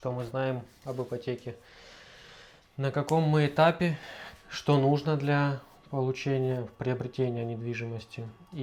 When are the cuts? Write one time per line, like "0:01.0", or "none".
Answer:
none